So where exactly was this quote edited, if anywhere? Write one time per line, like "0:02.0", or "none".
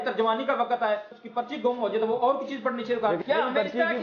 0:01.1
0:03.2

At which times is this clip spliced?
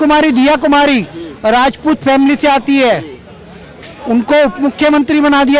none

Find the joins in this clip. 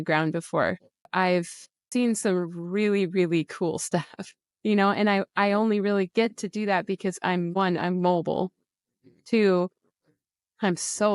0:01.0
0:01.9

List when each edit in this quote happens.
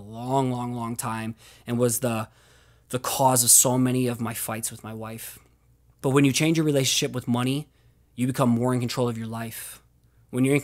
none

